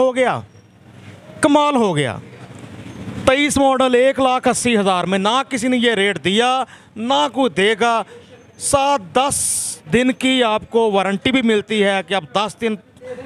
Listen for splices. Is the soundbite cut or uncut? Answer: uncut